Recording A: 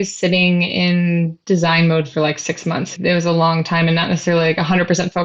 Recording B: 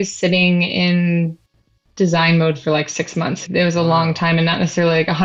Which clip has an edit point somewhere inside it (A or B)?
A